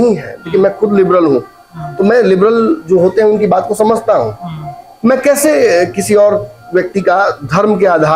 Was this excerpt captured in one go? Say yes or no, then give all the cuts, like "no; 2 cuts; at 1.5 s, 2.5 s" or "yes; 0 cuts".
yes; 0 cuts